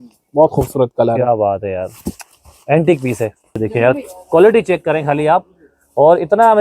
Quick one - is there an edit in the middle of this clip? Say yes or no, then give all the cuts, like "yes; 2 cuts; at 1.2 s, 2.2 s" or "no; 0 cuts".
yes; 1 cut; at 3.6 s